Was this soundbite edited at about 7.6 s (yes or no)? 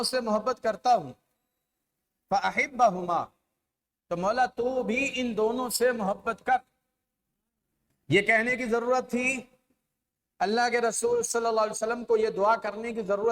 no